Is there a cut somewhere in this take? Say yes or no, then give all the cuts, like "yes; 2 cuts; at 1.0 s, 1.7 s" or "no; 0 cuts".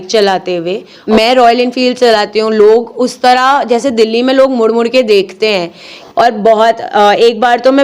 yes; 2 cuts; at 0.9 s, 5.9 s